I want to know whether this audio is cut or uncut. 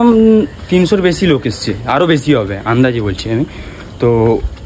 uncut